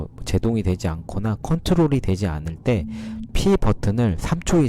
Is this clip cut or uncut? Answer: cut